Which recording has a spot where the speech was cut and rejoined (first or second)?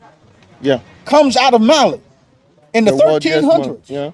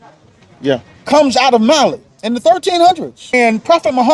second